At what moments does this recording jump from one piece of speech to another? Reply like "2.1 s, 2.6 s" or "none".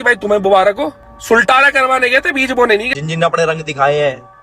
1.1 s, 2.9 s

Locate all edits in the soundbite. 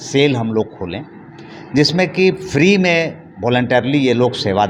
none

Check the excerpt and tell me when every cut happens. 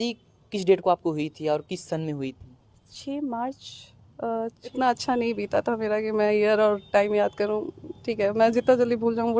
4.7 s

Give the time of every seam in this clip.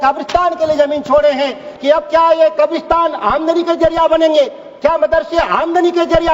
1.7 s

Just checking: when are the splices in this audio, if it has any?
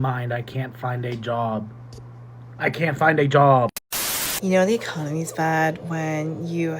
3.8 s

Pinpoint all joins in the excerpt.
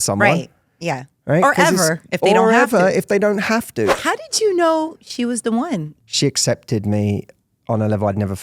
3.9 s, 5.9 s

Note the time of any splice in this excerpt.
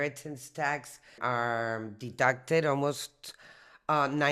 1.1 s

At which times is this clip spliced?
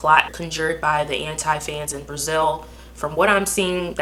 none

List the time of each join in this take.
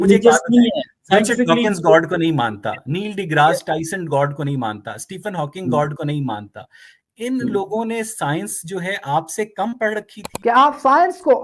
10.2 s

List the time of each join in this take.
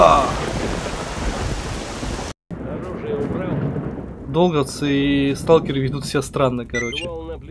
2.5 s

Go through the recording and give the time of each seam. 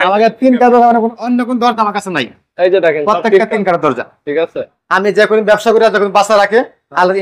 4.8 s

